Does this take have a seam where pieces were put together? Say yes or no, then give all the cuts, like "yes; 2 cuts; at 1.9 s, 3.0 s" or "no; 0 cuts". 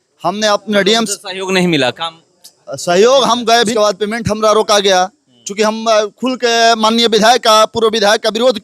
yes; 1 cut; at 3.7 s